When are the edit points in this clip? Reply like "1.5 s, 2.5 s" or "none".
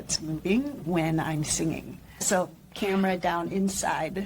2.2 s